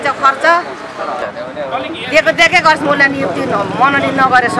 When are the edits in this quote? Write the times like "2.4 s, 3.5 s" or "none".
1.3 s